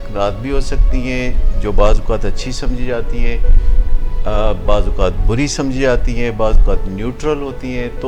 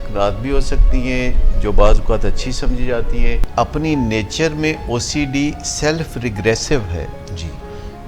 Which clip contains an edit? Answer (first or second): second